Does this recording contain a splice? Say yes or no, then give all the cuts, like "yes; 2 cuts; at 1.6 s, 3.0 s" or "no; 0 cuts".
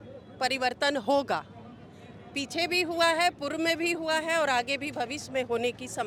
no; 0 cuts